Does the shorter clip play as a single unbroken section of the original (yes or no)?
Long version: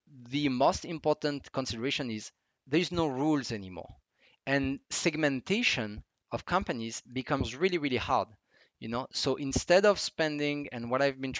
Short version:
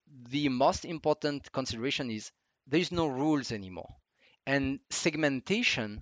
yes